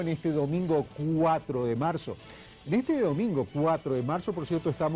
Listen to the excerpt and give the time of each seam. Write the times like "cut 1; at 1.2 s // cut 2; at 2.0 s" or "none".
none